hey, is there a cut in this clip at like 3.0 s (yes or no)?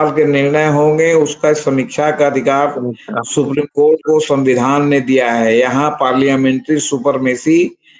no